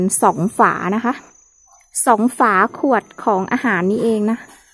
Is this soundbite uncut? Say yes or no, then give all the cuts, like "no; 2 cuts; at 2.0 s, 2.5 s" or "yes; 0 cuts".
yes; 0 cuts